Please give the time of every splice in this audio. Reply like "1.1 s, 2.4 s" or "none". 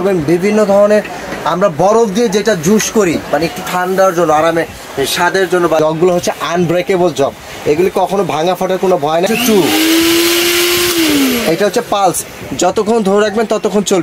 5.8 s, 9.3 s